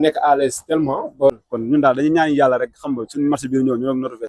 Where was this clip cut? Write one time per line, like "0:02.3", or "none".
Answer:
0:01.3